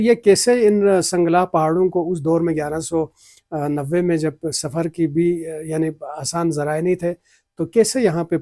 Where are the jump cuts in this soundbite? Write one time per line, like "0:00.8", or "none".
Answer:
none